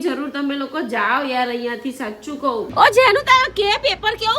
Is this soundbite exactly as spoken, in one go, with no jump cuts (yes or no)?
no